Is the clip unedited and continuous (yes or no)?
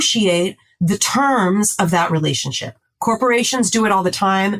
yes